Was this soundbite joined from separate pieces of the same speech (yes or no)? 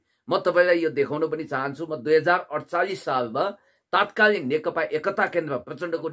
no